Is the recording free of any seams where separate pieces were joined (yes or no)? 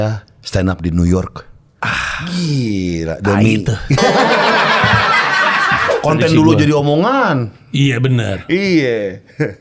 no